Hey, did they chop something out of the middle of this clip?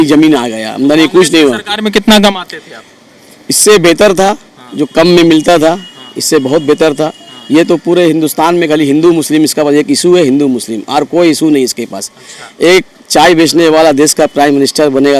no; 0 cuts

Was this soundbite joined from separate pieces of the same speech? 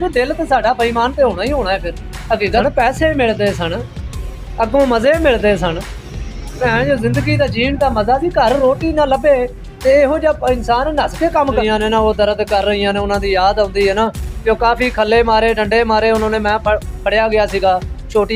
yes; 2 cuts; at 2.6 s, 11.6 s

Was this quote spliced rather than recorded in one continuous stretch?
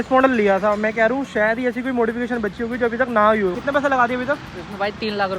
yes; 1 cut; at 3.6 s

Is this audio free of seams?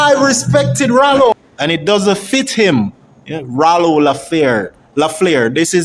no; 1 cut; at 1.3 s

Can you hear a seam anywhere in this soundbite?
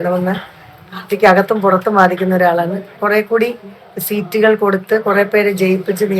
yes; 1 cut; at 3.0 s

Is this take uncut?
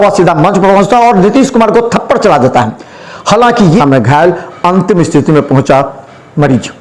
no; 1 cut; at 3.8 s

